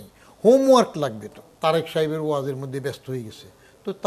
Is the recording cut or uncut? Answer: cut